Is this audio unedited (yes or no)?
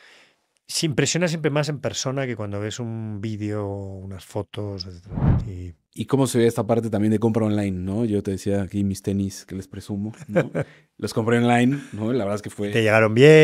no